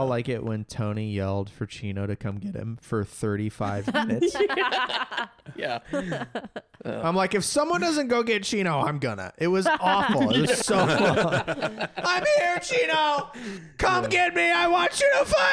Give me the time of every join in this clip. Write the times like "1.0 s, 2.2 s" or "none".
none